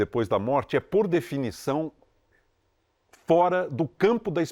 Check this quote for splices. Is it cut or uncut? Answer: uncut